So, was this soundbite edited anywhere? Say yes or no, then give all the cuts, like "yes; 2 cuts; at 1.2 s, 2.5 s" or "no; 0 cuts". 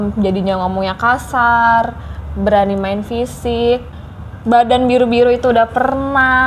yes; 1 cut; at 3.9 s